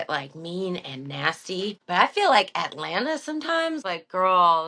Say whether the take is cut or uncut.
cut